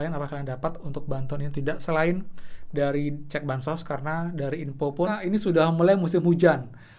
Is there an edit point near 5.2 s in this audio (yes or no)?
yes